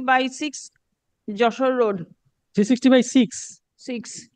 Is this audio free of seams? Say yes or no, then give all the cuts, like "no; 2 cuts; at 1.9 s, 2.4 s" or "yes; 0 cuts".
yes; 0 cuts